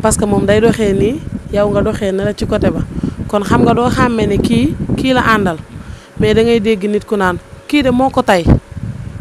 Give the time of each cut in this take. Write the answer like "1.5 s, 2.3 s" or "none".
none

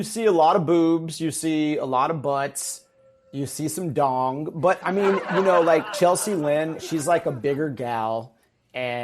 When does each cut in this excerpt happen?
6.8 s

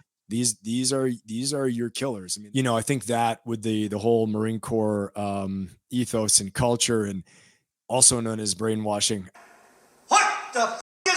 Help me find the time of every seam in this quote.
2.3 s

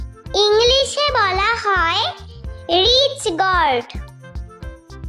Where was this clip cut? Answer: 3.9 s

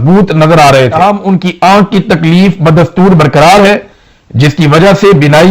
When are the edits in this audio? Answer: 0.9 s

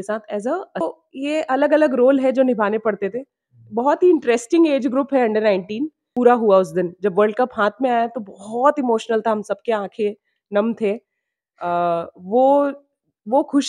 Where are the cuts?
0.8 s, 6.0 s

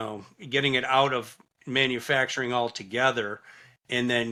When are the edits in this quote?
none

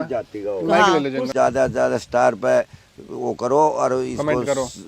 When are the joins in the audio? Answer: 1.3 s

